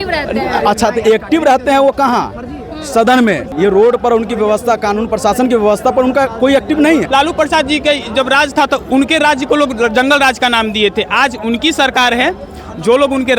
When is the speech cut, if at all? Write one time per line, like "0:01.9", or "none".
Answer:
0:03.5
0:07.1